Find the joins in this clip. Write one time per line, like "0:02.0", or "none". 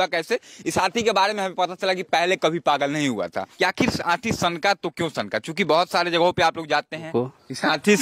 0:03.4
0:07.1

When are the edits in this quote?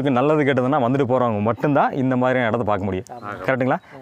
none

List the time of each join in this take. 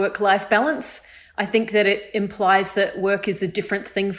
none

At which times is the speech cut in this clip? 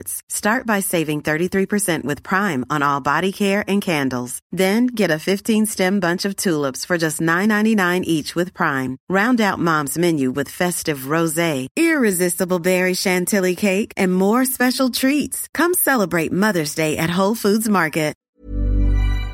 0:18.3

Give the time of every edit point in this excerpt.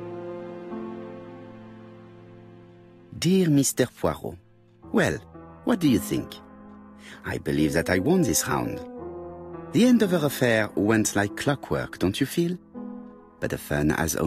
0:02.8

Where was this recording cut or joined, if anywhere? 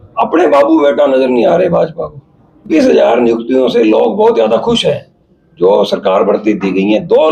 0:02.7

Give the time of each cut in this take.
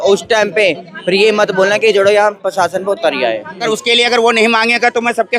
0:03.6

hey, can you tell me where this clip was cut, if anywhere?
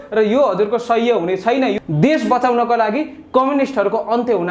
0:01.7

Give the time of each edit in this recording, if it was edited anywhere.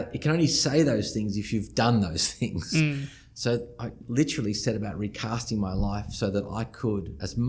none

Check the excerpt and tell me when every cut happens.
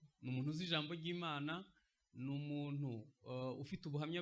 none

